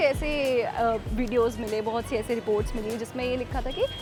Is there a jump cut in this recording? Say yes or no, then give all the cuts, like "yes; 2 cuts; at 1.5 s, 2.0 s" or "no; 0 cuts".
no; 0 cuts